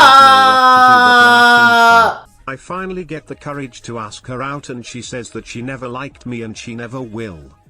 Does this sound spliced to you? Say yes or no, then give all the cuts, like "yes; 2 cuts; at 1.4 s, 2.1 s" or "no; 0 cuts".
yes; 1 cut; at 2.2 s